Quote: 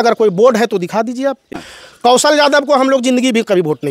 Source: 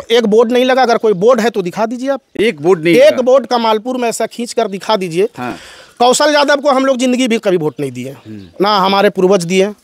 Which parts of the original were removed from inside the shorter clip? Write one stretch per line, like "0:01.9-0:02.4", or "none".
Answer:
0:02.3-0:05.4